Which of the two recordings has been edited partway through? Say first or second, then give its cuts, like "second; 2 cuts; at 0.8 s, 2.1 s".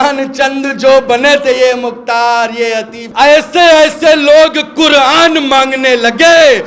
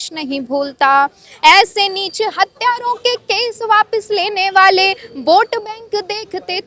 first; 1 cut; at 3.0 s